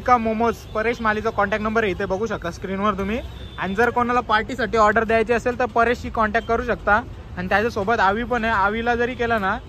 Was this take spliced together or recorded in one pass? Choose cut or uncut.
uncut